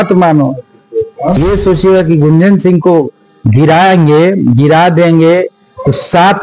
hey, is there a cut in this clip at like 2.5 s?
no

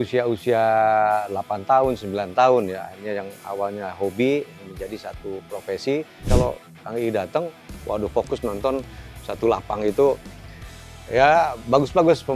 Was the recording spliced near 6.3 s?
yes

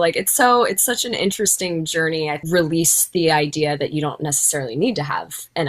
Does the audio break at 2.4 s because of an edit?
yes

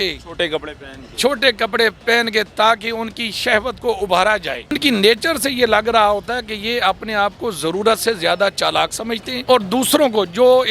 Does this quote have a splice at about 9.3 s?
yes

